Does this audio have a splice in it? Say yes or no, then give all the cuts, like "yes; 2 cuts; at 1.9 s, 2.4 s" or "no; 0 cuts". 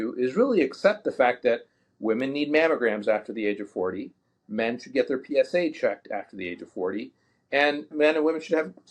yes; 1 cut; at 7.9 s